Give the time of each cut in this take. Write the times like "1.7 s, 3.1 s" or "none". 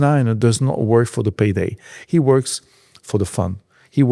1.3 s